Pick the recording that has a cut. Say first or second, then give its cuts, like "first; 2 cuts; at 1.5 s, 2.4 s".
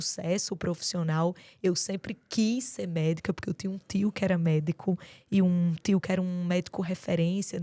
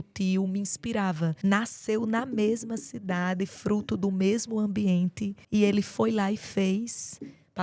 second; 2 cuts; at 1.4 s, 5.3 s